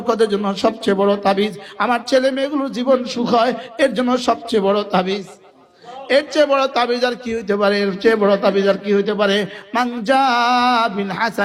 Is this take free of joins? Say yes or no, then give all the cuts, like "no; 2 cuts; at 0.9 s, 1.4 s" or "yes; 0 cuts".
yes; 0 cuts